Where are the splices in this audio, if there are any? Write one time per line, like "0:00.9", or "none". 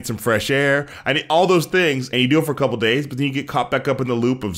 0:02.4